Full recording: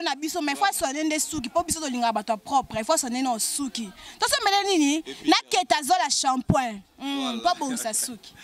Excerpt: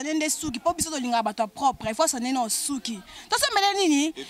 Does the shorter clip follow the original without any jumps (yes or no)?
yes